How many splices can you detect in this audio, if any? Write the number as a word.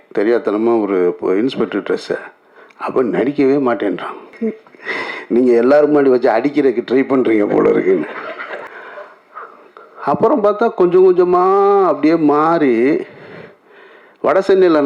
two